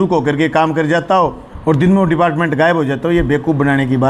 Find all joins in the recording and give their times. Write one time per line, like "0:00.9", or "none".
none